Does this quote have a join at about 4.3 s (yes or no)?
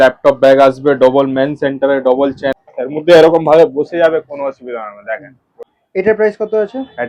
no